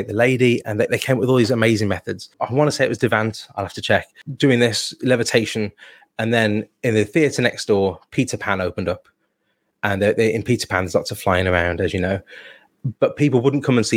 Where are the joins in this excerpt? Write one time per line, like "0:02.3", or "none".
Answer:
0:02.3
0:04.2